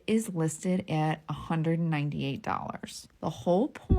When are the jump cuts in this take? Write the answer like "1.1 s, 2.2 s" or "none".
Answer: 3.0 s